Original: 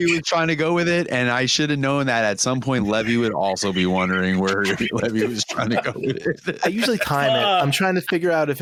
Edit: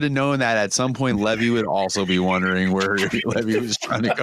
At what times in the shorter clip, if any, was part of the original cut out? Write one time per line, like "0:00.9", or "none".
none